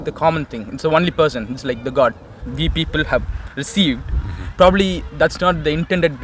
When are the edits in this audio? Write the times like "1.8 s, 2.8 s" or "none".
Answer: 2.4 s

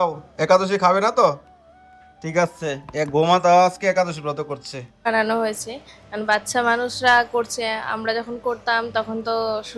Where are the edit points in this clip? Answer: 5.1 s

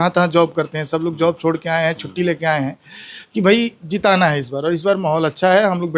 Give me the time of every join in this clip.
none

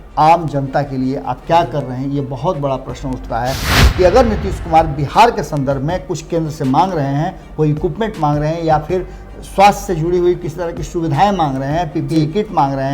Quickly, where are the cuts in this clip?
3.7 s

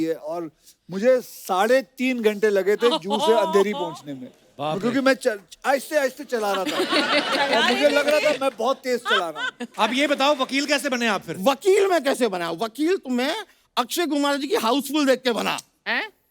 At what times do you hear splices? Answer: 9.6 s

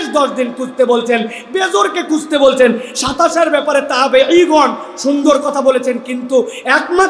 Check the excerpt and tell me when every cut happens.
none

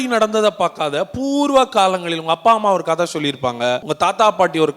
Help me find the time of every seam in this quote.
3.9 s

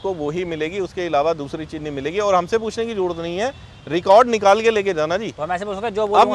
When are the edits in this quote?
none

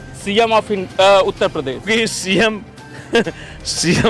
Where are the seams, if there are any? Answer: none

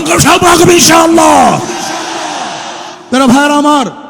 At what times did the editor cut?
2.9 s

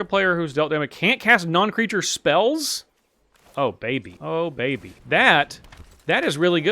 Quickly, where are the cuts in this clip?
4.1 s, 4.9 s

